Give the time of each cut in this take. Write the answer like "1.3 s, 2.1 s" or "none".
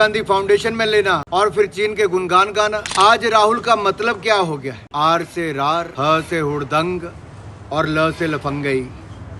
1.2 s, 2.8 s, 4.8 s, 5.9 s